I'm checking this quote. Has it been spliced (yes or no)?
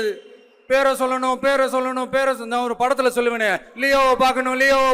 no